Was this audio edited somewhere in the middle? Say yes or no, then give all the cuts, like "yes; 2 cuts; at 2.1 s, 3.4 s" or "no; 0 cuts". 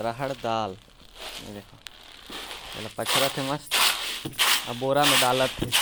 no; 0 cuts